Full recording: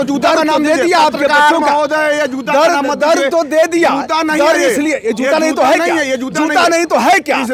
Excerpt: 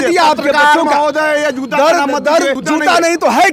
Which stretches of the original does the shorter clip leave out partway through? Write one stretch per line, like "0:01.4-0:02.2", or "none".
0:03.3-0:06.2